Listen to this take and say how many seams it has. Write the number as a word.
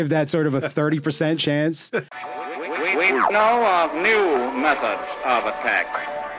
one